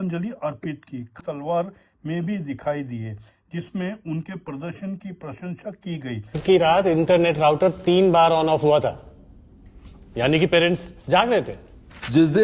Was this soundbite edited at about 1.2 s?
yes; 1 cut; at 1.2 s

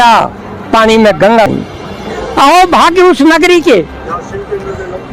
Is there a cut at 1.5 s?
yes; 1 cut; at 1.5 s

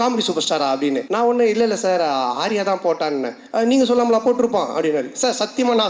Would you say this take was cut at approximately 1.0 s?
yes; 1 cut; at 1.0 s

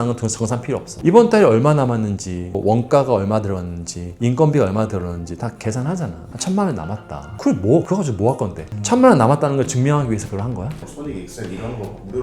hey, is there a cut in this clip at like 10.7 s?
yes; 1 cut; at 10.7 s

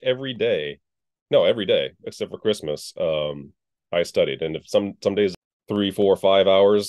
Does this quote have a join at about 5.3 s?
yes; 1 cut; at 5.3 s

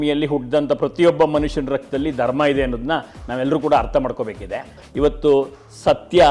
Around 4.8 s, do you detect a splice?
yes; 1 cut; at 4.8 s

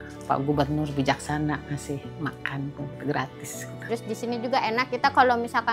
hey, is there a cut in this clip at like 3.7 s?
yes; 1 cut; at 3.7 s

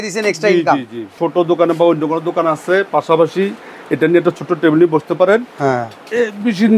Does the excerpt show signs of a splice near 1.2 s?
yes; 1 cut; at 1.2 s

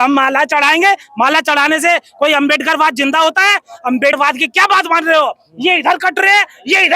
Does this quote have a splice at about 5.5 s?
no; 1 cut; at 4.1 s

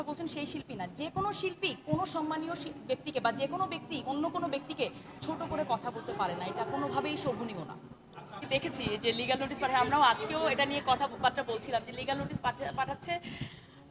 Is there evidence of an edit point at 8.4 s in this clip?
yes; 1 cut; at 8.4 s

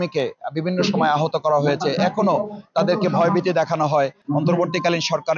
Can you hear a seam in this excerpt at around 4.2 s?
yes; 1 cut; at 4.2 s

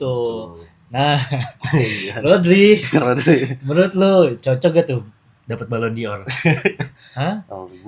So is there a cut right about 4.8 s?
no; 0 cuts

